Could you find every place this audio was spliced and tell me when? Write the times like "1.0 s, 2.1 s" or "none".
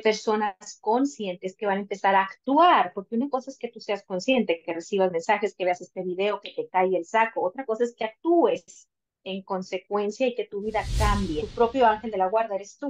11.4 s